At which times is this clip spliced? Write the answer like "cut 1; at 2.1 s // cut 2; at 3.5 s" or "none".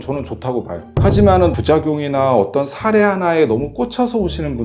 cut 1; at 1.5 s